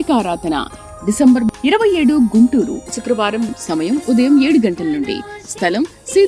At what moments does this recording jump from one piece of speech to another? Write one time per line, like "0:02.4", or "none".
none